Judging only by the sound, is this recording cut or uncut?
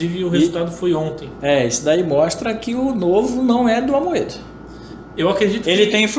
uncut